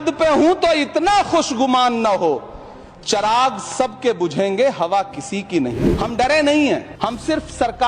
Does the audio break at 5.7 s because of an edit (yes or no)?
yes